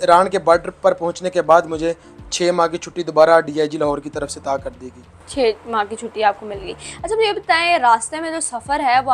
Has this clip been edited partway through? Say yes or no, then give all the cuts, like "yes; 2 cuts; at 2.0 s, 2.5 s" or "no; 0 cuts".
no; 0 cuts